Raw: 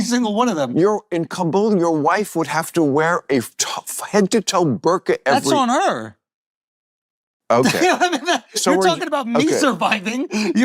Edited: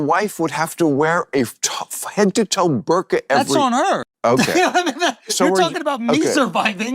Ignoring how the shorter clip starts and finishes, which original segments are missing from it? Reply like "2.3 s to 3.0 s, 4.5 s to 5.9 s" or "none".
6.1 s to 7.4 s